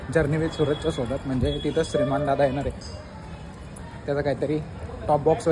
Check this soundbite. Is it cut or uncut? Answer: uncut